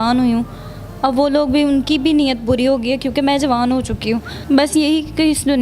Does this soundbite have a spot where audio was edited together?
yes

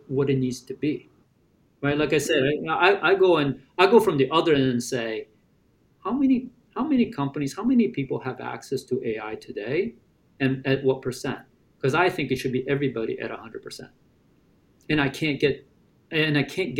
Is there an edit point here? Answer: no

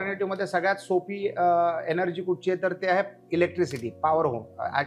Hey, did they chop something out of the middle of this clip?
no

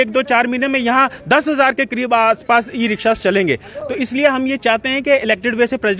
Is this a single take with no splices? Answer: yes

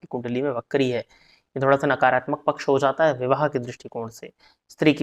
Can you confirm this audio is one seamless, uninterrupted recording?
yes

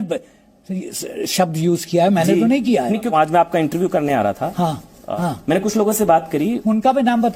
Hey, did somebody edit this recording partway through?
yes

